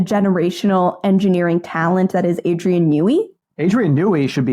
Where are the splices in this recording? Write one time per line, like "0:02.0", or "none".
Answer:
0:03.4